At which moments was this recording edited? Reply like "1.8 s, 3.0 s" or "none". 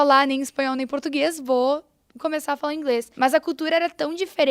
3.1 s